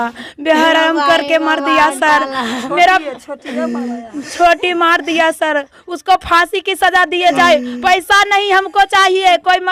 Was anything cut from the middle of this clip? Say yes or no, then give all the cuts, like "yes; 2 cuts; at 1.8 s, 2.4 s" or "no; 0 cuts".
no; 0 cuts